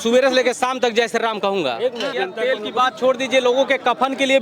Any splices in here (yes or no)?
yes